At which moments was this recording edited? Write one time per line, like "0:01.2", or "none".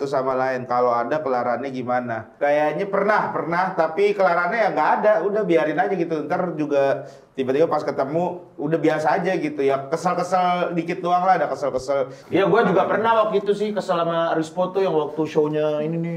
0:12.2